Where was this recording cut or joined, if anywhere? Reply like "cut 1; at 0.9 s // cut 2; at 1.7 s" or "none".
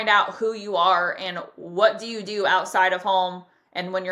none